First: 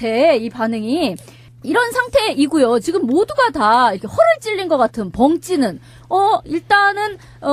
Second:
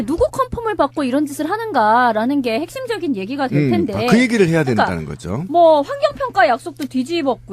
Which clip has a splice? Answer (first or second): second